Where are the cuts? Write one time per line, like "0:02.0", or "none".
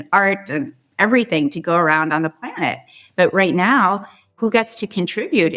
0:04.4